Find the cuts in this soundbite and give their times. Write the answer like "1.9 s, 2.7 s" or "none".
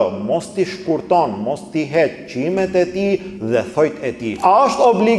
4.3 s